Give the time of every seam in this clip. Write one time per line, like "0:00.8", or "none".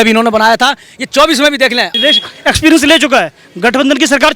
0:02.0